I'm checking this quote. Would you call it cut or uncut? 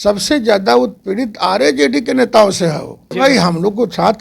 cut